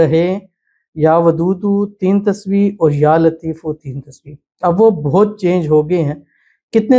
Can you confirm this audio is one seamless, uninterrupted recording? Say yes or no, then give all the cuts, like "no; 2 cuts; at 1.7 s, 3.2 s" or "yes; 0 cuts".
yes; 0 cuts